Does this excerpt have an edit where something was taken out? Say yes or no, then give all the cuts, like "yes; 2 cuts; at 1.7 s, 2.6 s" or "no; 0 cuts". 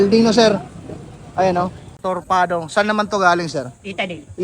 yes; 1 cut; at 2.0 s